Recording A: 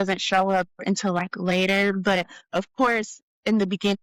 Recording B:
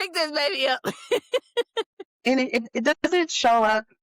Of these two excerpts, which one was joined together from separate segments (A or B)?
B